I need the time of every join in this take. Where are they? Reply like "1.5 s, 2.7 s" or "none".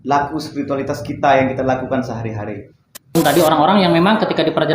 3.2 s